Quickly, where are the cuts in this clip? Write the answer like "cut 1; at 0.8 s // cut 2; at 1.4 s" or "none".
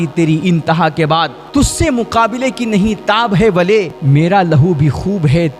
cut 1; at 1.4 s // cut 2; at 4.0 s